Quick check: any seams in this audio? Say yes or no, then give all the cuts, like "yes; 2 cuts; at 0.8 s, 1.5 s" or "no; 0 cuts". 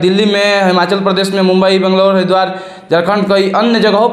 no; 0 cuts